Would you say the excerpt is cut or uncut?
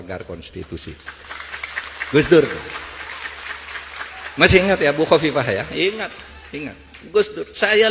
uncut